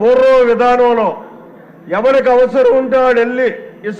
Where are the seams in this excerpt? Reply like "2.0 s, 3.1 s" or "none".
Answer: none